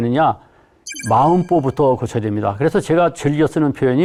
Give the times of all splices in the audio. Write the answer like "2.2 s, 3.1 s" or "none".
none